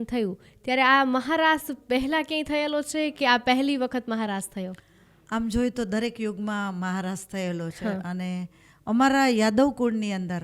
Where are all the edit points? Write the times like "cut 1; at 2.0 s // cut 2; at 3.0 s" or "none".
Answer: none